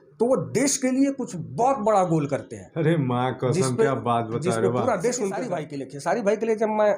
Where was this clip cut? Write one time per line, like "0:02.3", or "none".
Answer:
0:05.6